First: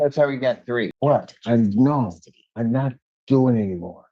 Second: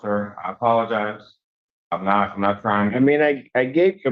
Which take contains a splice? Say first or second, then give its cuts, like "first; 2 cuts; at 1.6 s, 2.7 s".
first; 1 cut; at 0.9 s